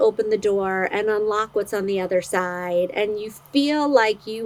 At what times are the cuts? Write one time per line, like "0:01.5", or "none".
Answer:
none